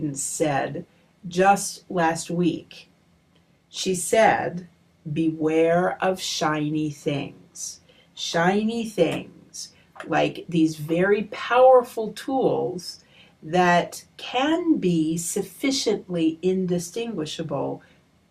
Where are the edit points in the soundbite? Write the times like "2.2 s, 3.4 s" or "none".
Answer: 1.5 s